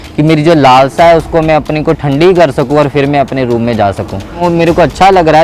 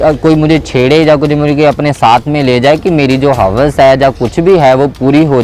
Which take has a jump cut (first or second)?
first